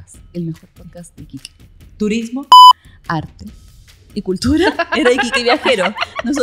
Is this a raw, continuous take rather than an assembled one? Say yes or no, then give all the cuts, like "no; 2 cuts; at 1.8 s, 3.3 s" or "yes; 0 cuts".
yes; 0 cuts